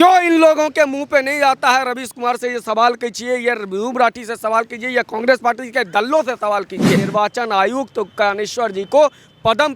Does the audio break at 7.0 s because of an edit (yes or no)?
yes